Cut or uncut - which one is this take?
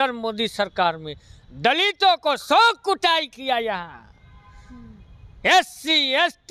uncut